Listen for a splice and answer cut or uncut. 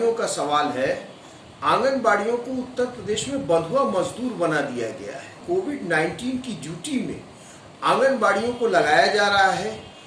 cut